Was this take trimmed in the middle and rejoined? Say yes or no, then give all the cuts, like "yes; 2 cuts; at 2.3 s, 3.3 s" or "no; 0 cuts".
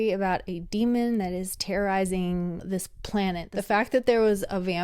yes; 1 cut; at 3.5 s